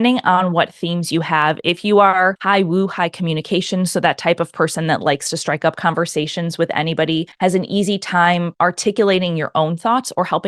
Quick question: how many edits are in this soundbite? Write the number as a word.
three